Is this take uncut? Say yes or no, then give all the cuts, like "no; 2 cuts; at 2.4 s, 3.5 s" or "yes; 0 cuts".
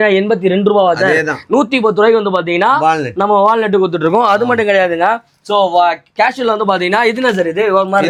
yes; 0 cuts